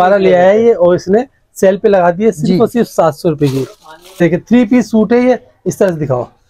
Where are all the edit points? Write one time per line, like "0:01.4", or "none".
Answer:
0:04.2